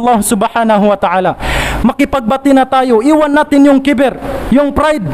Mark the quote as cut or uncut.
uncut